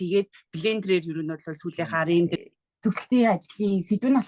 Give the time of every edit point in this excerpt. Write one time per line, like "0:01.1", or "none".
0:02.4